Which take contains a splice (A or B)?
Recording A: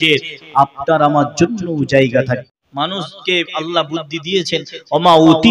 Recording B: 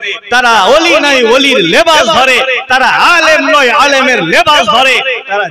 A